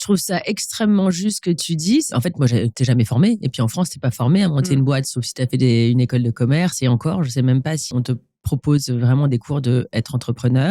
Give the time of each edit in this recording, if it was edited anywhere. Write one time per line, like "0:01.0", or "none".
0:02.1
0:07.9